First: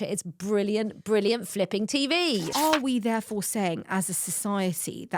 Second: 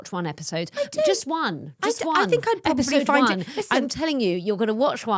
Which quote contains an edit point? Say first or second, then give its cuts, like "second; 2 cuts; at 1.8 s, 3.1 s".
first; 1 cut; at 2.4 s